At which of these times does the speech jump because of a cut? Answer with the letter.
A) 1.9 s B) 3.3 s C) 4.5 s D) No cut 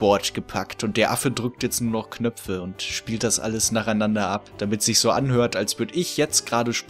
C